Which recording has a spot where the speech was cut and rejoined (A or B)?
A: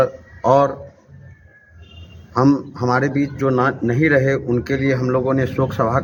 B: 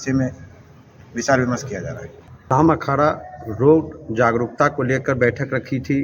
B